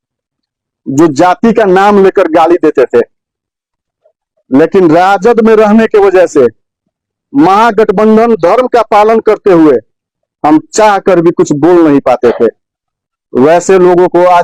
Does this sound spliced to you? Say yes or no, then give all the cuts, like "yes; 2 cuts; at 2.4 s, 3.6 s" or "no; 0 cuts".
no; 0 cuts